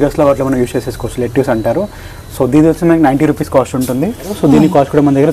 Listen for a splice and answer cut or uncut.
cut